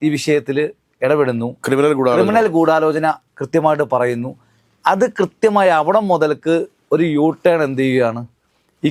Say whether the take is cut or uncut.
uncut